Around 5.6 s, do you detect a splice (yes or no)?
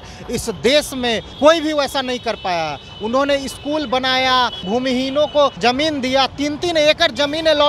yes